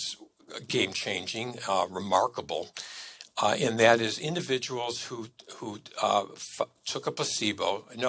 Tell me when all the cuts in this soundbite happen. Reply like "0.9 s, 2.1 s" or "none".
none